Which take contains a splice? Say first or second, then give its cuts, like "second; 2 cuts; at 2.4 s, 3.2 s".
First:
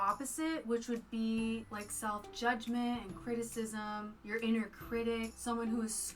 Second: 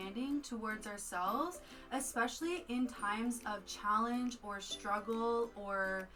first; 3 cuts; at 1.7 s, 4.2 s, 5.3 s